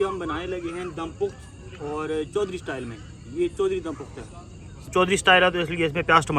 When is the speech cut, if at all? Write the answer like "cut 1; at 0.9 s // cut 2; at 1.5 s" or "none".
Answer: cut 1; at 4.9 s